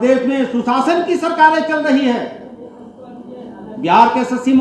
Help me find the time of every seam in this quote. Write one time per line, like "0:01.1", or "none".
none